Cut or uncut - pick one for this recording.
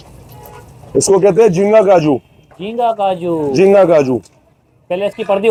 uncut